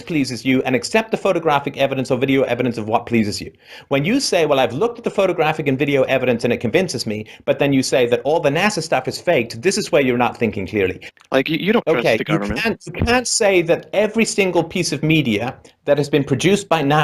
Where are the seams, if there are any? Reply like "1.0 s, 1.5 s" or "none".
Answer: 4.9 s